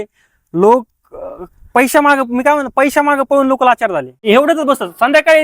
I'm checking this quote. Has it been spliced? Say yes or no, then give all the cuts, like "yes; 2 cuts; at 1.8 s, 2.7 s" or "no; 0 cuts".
yes; 1 cut; at 4.3 s